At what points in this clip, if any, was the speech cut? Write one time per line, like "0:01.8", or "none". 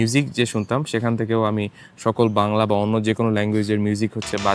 none

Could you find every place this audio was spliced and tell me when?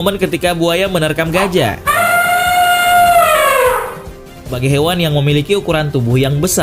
0:04.5

